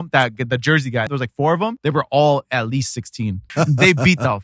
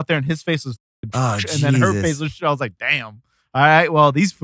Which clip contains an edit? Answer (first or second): first